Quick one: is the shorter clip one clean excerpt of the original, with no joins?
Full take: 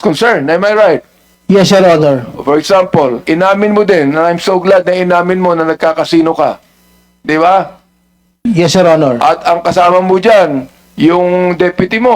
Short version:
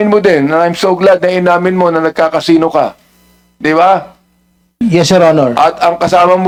yes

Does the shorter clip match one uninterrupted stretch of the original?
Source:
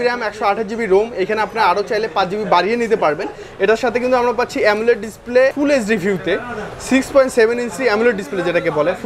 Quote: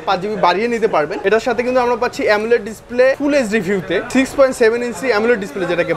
no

